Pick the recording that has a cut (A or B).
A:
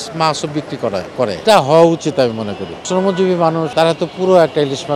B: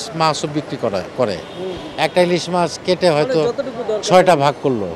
A